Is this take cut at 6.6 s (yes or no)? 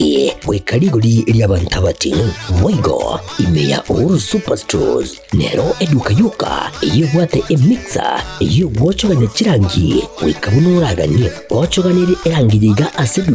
no